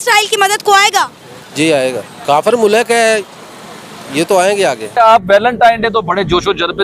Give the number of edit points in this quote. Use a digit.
2